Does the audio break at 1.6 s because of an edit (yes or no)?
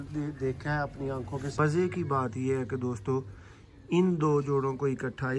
yes